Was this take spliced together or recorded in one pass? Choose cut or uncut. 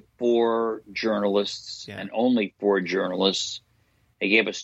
uncut